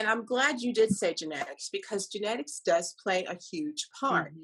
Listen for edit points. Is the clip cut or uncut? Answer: uncut